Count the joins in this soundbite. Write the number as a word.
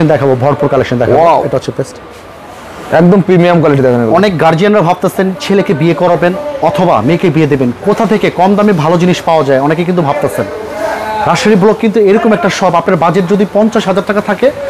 zero